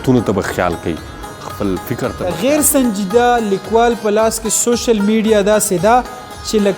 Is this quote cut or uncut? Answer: cut